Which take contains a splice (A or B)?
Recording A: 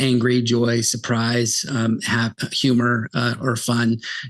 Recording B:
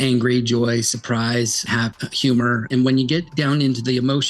B